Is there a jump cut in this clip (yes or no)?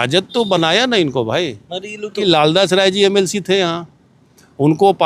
yes